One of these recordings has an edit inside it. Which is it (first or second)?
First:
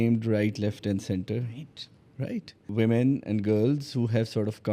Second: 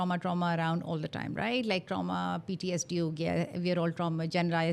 first